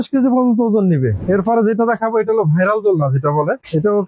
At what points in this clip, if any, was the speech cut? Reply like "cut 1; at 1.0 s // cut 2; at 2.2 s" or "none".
cut 1; at 1.2 s